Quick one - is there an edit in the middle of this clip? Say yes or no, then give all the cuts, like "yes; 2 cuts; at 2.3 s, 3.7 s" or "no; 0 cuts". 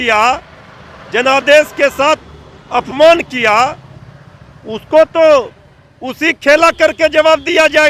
no; 0 cuts